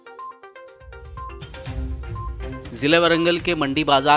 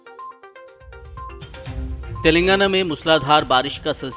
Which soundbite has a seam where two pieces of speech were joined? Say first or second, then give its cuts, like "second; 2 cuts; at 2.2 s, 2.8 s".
first; 1 cut; at 1.8 s